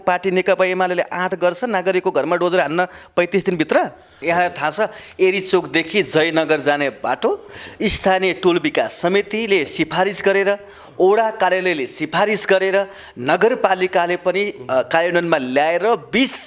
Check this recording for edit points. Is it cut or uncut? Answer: cut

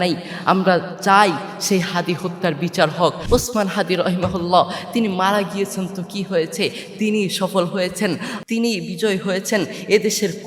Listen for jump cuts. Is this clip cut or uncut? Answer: cut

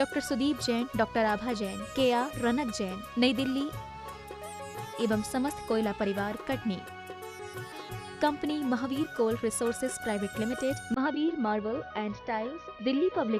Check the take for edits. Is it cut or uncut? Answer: uncut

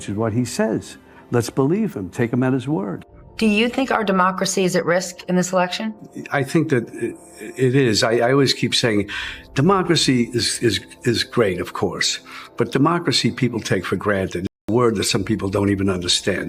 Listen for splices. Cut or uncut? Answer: cut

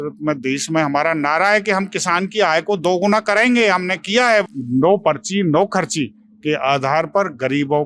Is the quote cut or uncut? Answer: cut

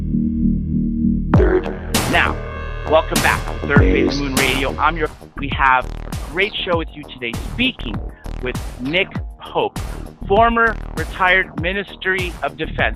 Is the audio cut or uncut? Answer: uncut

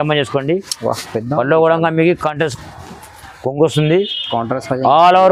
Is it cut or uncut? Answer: uncut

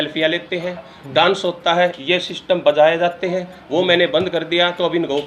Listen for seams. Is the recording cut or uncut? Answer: uncut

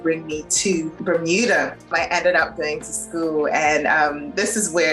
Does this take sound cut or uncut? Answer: cut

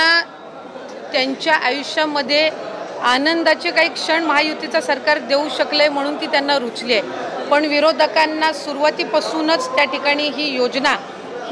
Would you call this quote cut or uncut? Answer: uncut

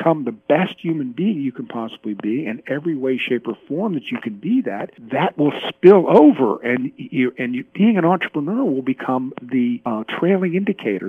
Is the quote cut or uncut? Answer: cut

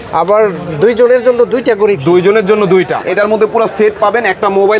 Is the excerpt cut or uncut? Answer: cut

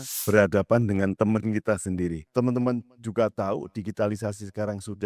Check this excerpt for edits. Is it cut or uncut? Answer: cut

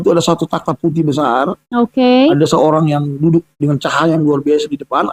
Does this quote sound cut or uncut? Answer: uncut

